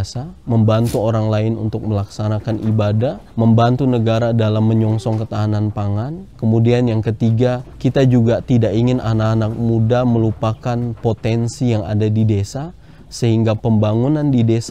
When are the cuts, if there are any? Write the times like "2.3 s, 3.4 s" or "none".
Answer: 3.2 s, 6.2 s, 7.7 s